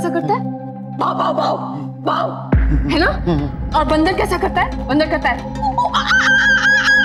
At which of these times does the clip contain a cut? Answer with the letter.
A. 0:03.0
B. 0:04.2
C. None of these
C